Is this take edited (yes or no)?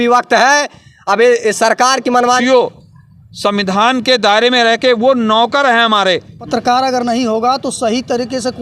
yes